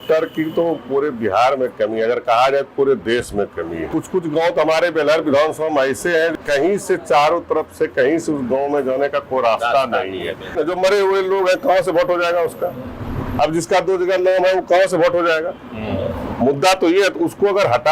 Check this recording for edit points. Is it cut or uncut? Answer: cut